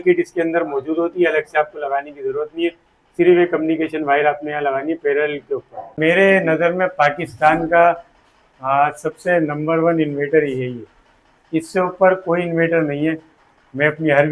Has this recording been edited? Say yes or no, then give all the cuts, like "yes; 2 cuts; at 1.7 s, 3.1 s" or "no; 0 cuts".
yes; 1 cut; at 6.0 s